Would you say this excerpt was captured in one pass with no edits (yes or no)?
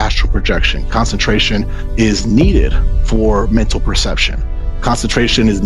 yes